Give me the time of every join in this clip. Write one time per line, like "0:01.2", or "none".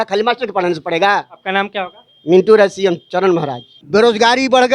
0:03.7